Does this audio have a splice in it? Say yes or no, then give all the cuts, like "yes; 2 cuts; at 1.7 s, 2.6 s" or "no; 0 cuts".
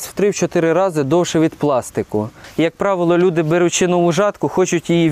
yes; 1 cut; at 2.4 s